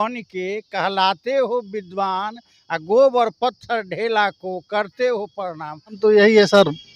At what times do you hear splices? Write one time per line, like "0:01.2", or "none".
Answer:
0:06.0